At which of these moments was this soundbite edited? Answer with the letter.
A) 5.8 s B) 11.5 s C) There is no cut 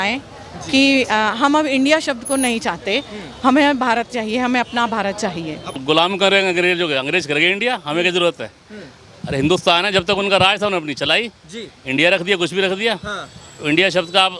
A